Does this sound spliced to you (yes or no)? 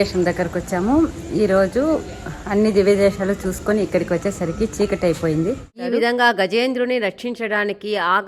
yes